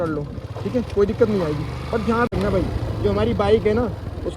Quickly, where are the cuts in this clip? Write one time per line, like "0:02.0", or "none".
0:02.3